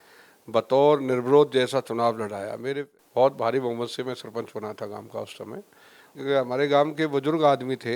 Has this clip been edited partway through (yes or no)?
yes